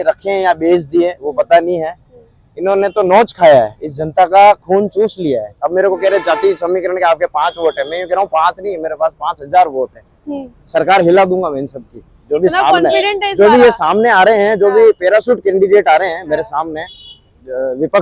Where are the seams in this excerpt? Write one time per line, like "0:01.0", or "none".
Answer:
0:05.6